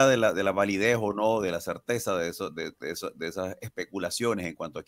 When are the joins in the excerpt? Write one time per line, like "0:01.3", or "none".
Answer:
none